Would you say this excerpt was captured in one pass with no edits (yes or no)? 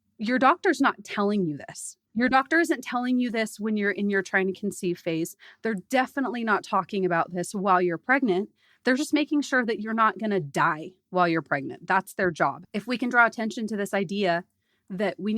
no